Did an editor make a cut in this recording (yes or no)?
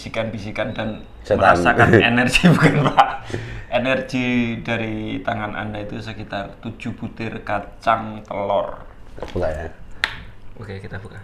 no